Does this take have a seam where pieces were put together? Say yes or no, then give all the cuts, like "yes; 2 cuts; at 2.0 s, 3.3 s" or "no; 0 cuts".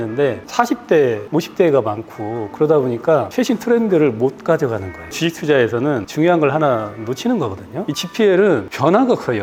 no; 0 cuts